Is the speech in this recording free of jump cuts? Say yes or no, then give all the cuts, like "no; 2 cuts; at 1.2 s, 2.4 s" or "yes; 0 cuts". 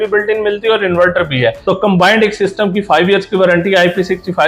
no; 1 cut; at 1.6 s